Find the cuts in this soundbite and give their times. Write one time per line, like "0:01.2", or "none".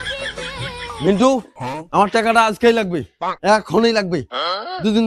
none